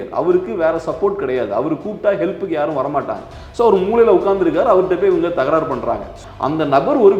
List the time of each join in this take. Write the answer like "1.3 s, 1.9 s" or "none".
6.2 s